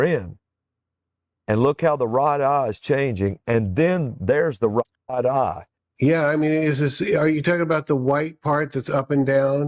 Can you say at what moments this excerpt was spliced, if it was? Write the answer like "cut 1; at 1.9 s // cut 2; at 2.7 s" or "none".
cut 1; at 5.0 s